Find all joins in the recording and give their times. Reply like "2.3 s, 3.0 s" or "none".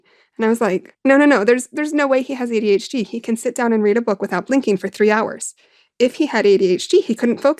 none